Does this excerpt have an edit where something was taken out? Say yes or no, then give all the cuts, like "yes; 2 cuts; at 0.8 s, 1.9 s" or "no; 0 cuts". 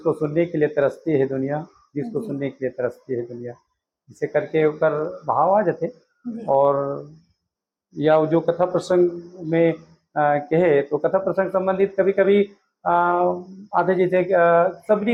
no; 0 cuts